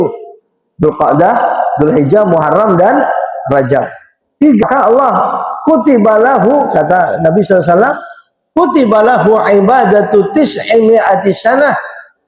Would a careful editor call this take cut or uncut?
cut